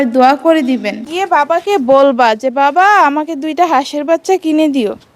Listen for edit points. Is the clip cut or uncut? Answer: cut